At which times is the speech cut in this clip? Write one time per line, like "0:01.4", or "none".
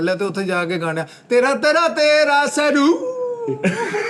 none